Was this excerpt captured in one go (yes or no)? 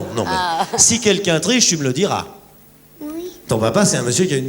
no